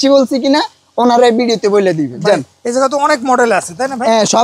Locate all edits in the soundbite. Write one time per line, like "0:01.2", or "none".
none